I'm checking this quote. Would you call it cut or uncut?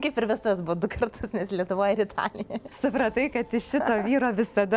cut